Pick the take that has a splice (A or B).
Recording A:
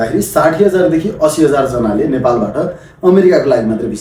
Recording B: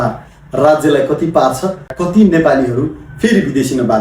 B